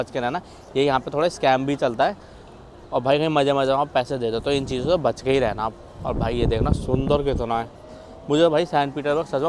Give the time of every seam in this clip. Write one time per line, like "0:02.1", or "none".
none